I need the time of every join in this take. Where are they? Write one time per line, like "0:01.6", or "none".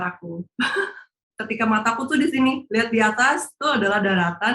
0:01.3